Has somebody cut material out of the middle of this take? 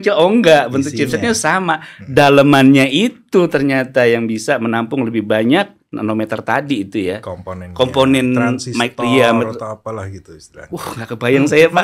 no; 0 cuts

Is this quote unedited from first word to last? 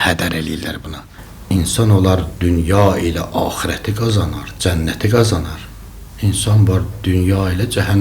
no; 1 cut; at 1.0 s

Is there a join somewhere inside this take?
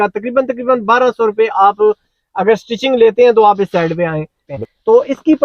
yes; 1 cut; at 4.4 s

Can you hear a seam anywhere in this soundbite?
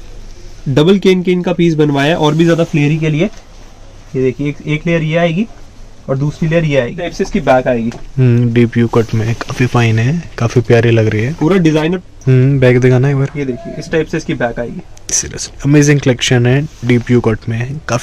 yes; 2 cuts; at 7.0 s, 12.0 s

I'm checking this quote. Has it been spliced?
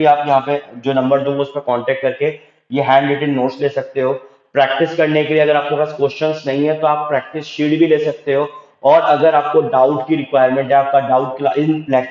no; 0 cuts

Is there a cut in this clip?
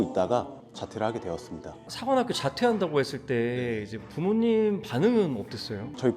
no; 0 cuts

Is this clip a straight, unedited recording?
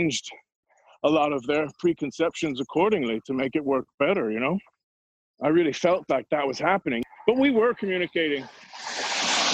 no; 2 cuts; at 5.0 s, 7.0 s

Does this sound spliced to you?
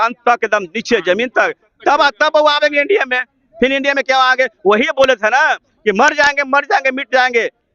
no; 0 cuts

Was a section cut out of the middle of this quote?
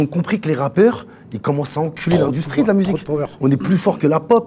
no; 0 cuts

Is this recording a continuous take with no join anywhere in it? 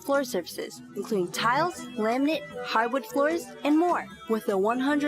no; 3 cuts; at 1.8 s, 2.6 s, 4.1 s

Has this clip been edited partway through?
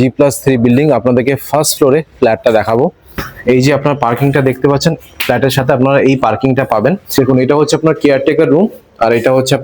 yes; 2 cuts; at 3.3 s, 7.1 s

